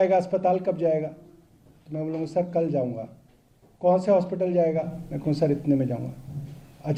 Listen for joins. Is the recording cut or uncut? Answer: uncut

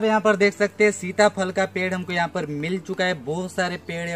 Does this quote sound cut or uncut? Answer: uncut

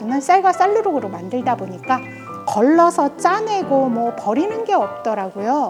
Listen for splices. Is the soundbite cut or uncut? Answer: uncut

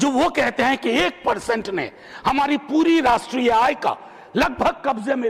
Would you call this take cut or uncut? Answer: uncut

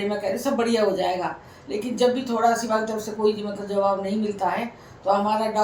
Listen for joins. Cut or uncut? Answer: uncut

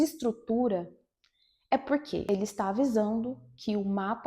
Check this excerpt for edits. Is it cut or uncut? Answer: cut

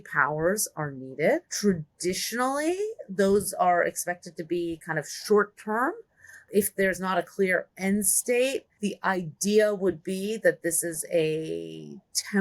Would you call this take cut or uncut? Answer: cut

